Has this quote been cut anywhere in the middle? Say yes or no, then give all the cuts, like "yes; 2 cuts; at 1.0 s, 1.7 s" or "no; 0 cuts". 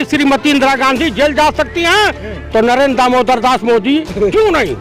no; 0 cuts